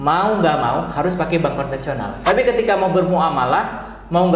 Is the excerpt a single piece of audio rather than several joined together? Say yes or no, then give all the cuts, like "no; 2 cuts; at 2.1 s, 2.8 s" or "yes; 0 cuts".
no; 1 cut; at 2.1 s